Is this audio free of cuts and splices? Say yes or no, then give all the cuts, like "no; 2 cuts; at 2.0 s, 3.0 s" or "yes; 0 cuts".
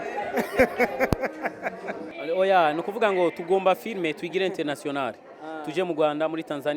no; 1 cut; at 2.1 s